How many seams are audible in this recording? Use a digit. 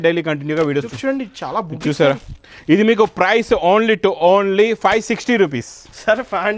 1